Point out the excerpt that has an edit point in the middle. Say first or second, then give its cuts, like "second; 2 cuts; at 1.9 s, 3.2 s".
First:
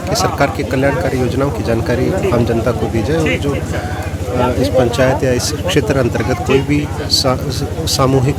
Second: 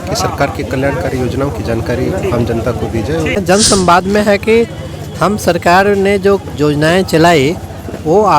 second; 1 cut; at 3.4 s